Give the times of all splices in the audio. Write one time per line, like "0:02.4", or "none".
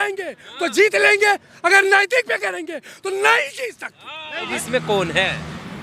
0:04.5